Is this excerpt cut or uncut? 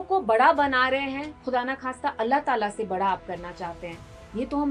uncut